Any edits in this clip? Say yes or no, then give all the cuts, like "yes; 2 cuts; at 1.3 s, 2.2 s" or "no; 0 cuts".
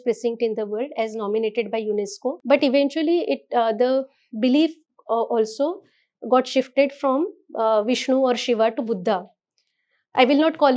yes; 1 cut; at 2.3 s